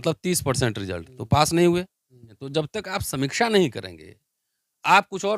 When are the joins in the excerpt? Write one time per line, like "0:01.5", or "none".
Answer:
0:02.4